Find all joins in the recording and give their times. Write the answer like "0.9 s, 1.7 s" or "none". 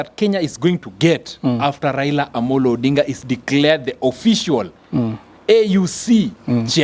none